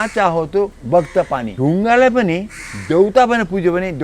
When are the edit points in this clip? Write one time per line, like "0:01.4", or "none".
0:01.5